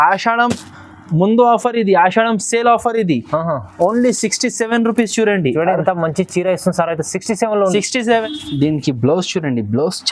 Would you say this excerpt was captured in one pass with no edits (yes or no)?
no